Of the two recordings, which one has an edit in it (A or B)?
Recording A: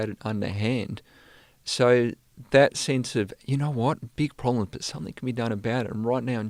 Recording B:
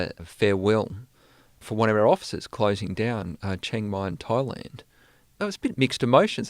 B